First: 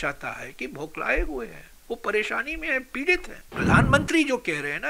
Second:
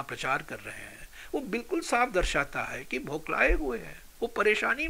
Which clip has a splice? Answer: first; 1 cut; at 3.5 s

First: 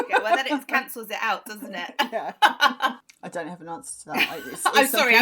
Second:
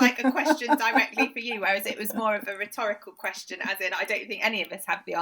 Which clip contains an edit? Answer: first; 1 cut; at 3.0 s

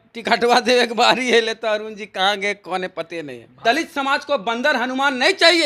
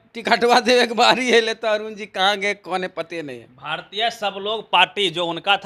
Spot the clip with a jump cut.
first; 1 cut; at 3.6 s

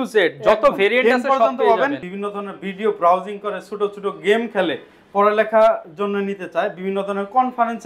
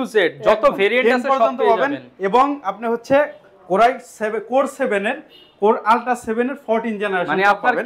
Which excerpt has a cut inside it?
first; 1 cut; at 2.1 s

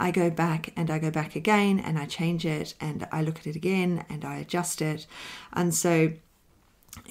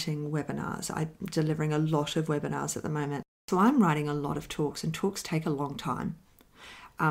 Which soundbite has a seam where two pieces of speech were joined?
second; 1 cut; at 3.4 s

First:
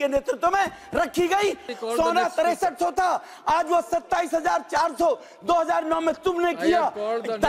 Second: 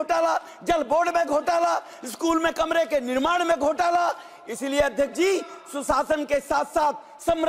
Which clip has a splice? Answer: first; 1 cut; at 1.7 s

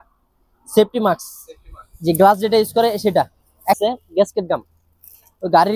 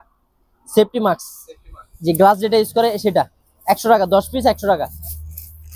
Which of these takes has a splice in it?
first; 1 cut; at 3.8 s

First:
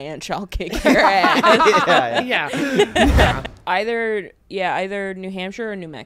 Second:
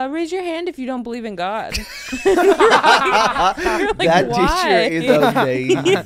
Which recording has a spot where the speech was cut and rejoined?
first; 1 cut; at 3.4 s

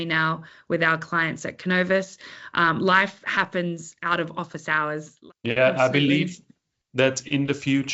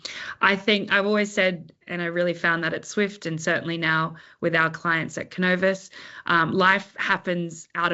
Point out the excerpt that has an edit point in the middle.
first; 1 cut; at 5.1 s

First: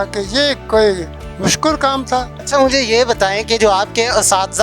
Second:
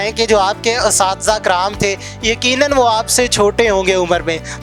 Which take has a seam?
first; 1 cut; at 2.4 s

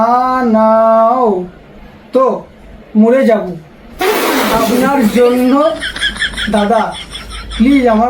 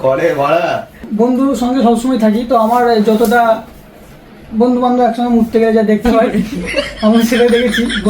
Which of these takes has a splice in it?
second; 1 cut; at 1.0 s

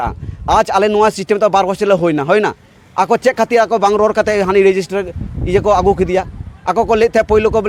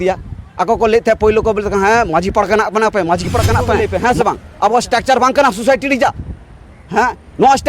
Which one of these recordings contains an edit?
second; 1 cut; at 3.8 s

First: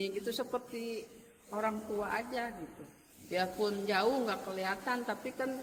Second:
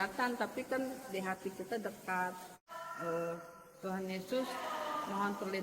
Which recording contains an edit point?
second; 1 cut; at 2.8 s

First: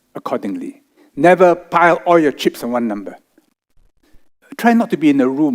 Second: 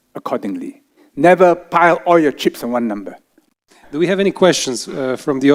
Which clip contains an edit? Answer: first; 1 cut; at 3.7 s

